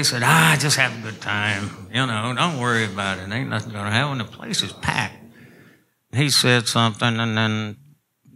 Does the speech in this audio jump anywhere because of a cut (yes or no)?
yes